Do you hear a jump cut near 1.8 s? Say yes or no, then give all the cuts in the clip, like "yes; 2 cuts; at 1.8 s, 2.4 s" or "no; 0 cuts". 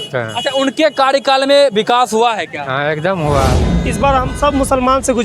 no; 1 cut; at 3.6 s